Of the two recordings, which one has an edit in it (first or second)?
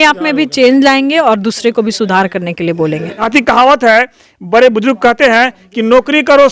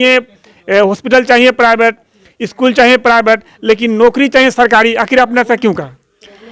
first